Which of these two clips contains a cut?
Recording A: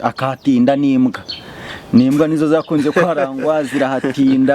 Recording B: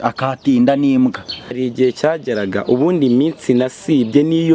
B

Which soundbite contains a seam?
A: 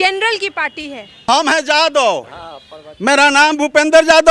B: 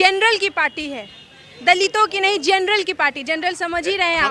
A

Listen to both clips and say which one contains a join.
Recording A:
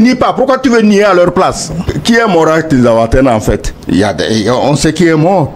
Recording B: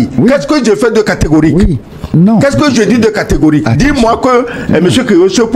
A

